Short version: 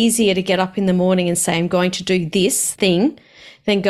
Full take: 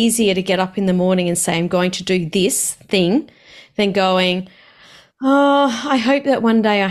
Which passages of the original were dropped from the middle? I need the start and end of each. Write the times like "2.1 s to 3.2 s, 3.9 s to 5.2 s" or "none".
2.7 s to 2.8 s